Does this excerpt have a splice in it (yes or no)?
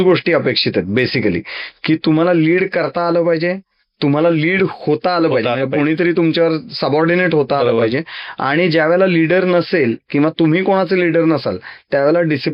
no